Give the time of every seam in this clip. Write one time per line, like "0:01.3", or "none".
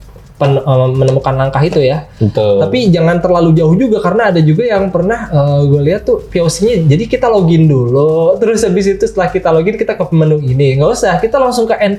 none